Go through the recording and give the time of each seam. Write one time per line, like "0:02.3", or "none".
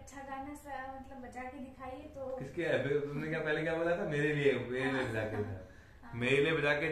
none